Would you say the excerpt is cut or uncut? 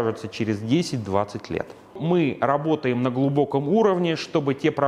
cut